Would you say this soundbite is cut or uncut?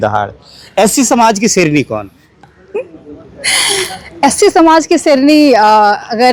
uncut